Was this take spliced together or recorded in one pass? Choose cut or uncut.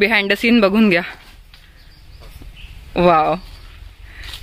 uncut